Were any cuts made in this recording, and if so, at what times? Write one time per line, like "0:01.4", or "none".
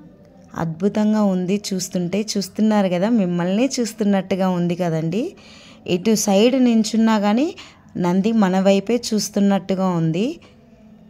none